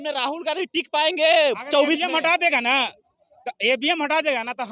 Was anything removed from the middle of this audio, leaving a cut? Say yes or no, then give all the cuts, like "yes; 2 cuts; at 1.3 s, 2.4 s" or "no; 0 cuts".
no; 0 cuts